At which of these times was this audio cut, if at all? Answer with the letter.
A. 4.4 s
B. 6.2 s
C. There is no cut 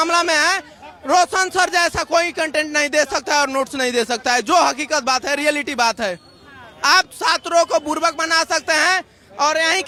C